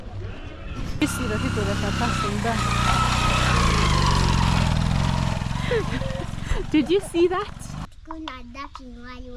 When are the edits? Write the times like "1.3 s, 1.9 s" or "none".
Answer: 1.0 s, 7.9 s